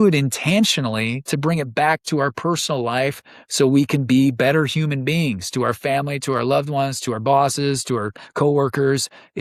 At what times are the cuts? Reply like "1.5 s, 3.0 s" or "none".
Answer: none